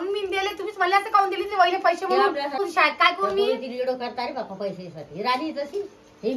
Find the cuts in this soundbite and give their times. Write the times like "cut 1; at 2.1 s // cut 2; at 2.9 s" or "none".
cut 1; at 2.6 s